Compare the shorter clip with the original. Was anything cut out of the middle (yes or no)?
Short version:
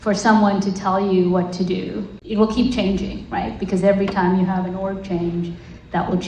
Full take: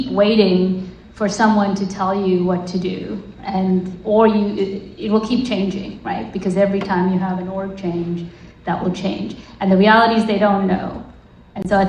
yes